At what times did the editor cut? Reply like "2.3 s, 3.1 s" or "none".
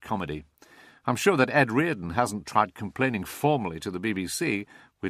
none